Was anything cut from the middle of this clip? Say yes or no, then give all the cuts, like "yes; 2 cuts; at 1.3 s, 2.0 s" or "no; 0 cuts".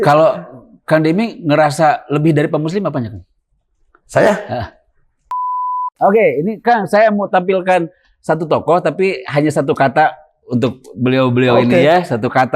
yes; 1 cut; at 5.4 s